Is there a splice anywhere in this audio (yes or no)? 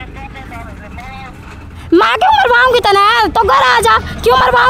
no